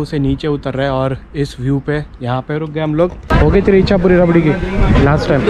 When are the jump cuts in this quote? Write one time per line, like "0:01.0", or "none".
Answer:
0:03.3